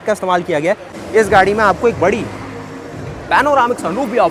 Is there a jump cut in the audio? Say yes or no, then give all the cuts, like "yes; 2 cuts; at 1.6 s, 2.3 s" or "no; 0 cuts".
yes; 1 cut; at 0.9 s